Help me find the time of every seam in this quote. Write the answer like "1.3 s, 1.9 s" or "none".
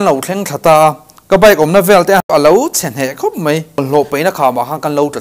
2.3 s, 3.8 s

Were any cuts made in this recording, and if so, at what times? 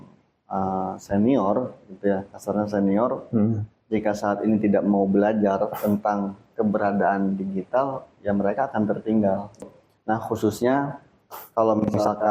9.6 s

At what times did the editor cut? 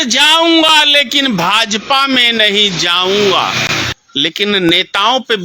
4.0 s

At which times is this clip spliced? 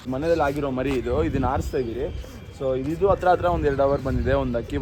none

